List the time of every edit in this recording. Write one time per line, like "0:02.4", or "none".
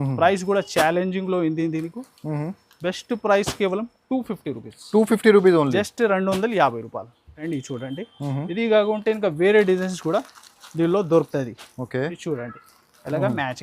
0:07.4